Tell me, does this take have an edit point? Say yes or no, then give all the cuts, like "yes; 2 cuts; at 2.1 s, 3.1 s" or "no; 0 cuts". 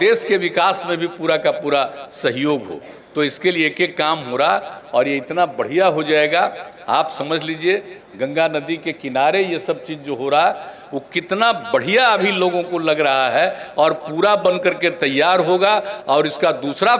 no; 0 cuts